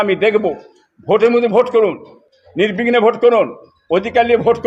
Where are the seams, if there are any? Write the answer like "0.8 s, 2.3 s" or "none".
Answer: none